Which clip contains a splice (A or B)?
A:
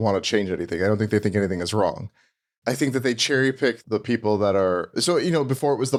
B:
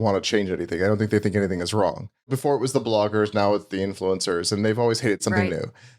B